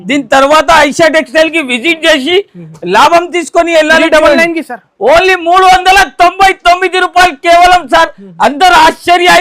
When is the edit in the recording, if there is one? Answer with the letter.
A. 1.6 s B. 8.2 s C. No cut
C